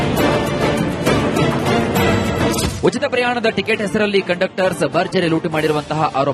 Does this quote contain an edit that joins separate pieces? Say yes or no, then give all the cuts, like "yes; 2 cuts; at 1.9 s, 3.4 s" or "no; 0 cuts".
no; 0 cuts